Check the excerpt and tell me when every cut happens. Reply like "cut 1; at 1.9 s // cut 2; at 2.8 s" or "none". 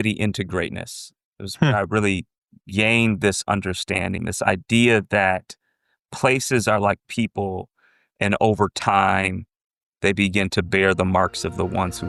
none